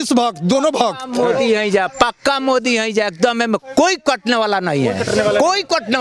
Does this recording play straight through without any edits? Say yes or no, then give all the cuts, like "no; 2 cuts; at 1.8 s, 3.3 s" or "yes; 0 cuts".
yes; 0 cuts